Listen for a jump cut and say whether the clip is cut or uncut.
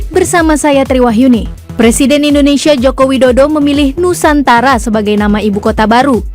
cut